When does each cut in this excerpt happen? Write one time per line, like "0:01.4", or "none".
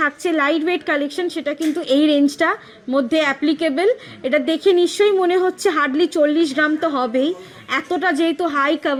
none

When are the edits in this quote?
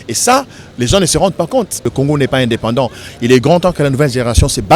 0:01.9

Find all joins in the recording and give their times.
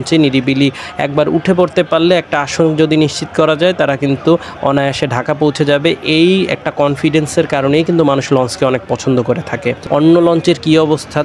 0:09.8

